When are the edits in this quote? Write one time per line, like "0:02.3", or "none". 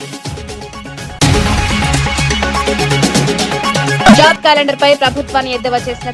0:01.1
0:04.0